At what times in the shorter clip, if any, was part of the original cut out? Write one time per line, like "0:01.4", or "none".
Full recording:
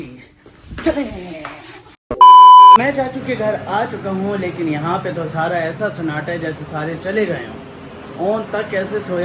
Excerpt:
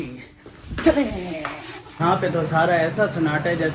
0:02.0